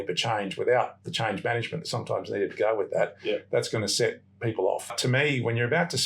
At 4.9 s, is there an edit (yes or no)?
yes